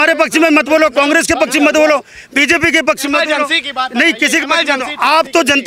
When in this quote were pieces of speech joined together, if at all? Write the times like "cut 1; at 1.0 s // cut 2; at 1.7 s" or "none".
none

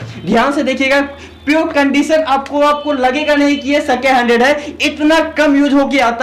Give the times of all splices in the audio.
none

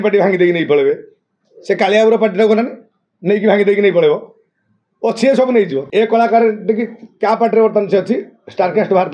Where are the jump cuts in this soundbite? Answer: cut 1; at 5.9 s

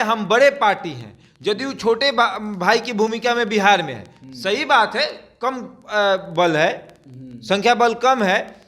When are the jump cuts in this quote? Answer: none

